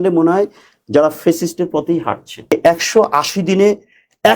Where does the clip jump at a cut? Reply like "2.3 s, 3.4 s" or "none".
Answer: 2.5 s